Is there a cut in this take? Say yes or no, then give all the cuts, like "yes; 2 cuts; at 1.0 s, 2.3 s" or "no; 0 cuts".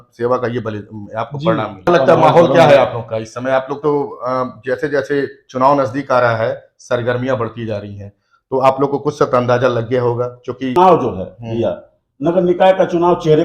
yes; 2 cuts; at 1.9 s, 10.7 s